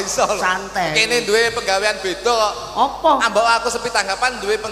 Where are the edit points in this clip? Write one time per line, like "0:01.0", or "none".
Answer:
none